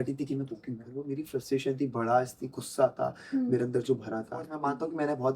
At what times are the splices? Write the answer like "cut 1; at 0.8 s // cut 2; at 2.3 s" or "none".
cut 1; at 1.0 s // cut 2; at 4.5 s